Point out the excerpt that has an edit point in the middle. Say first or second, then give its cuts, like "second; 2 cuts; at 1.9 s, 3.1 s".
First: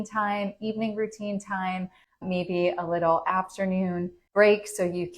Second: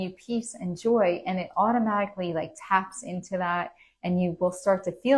first; 1 cut; at 4.1 s